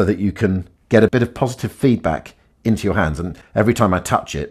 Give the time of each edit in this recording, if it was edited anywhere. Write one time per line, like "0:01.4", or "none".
0:01.1
0:03.3